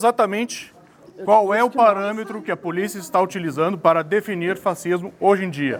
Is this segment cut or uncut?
uncut